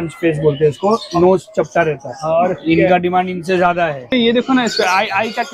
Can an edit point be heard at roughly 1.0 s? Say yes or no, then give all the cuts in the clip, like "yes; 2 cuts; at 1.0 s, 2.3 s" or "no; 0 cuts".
no; 1 cut; at 4.1 s